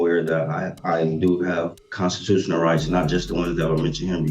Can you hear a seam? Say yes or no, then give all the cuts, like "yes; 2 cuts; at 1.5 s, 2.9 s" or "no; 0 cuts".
no; 0 cuts